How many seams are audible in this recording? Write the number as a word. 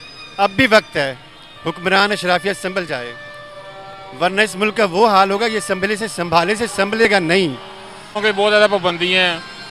one